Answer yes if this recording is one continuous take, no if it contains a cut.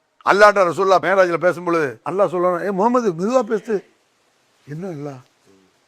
no